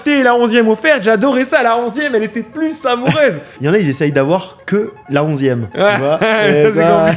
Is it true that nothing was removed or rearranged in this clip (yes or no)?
no